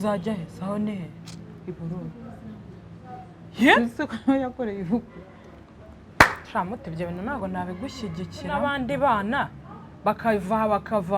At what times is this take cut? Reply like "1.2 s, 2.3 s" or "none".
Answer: 8.6 s

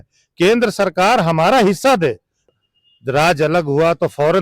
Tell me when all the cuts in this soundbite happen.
2.4 s

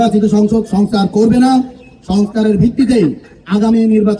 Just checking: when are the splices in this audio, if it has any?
none

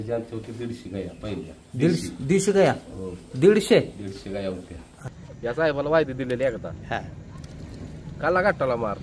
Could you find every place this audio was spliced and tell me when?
5.1 s

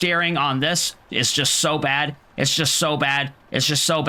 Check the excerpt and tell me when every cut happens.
none

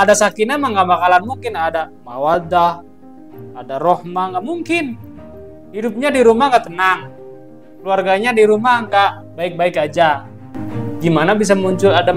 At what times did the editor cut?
none

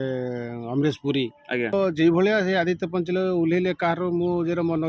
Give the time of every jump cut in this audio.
1.7 s

